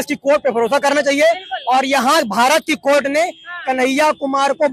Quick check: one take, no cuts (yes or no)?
yes